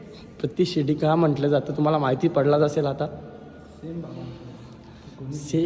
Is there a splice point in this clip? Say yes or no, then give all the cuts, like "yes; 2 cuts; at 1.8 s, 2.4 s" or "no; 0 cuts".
no; 0 cuts